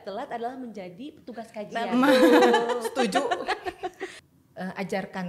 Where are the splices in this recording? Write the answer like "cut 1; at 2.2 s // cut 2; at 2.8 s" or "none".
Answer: cut 1; at 4.1 s